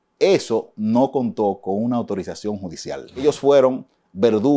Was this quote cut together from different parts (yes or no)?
yes